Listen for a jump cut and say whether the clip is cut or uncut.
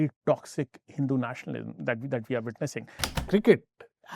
cut